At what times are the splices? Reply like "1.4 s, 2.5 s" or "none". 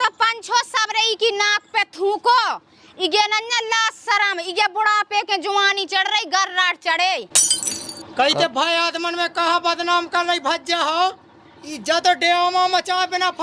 none